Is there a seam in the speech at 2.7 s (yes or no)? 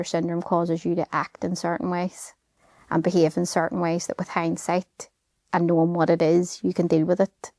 no